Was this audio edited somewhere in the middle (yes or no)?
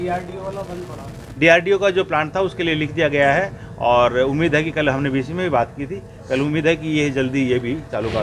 no